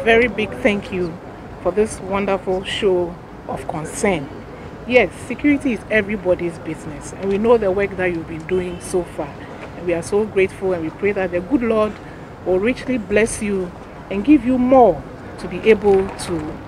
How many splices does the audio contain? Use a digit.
0